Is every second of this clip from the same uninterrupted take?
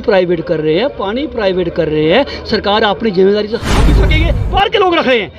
no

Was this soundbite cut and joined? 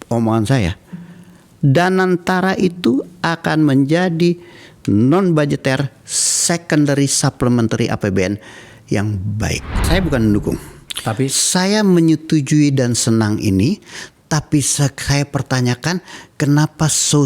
yes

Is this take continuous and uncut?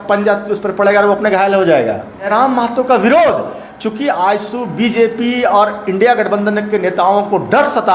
no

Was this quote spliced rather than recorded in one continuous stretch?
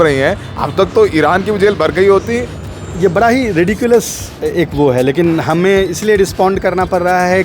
yes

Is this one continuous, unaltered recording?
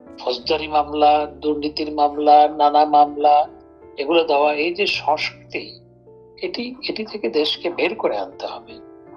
yes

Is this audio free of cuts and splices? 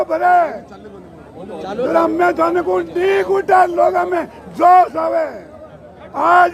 yes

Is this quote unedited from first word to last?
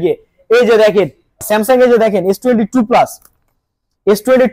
no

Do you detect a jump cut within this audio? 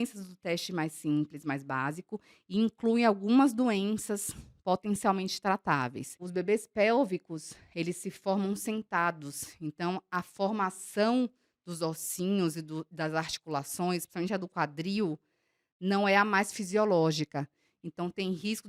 yes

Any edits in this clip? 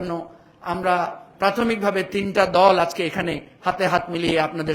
no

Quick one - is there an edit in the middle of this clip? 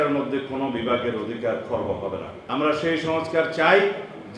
yes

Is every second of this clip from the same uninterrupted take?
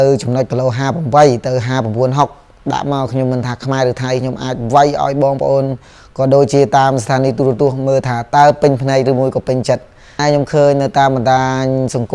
no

